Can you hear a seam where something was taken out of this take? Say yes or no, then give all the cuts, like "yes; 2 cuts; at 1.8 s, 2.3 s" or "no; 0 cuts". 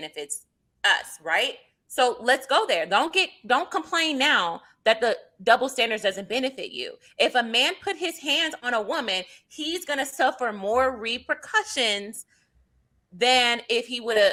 no; 0 cuts